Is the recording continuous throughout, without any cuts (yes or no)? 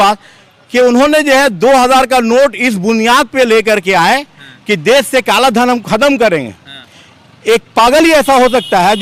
yes